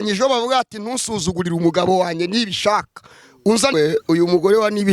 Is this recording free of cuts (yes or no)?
no